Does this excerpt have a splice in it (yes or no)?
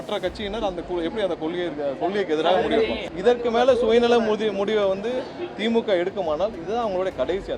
yes